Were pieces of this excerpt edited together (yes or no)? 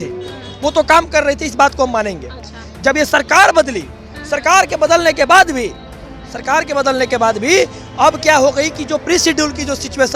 no